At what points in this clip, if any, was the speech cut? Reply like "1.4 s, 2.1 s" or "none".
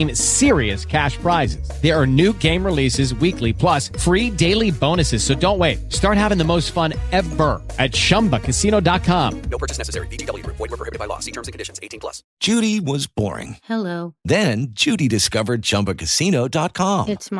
12.3 s